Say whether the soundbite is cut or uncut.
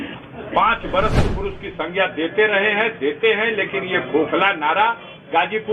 cut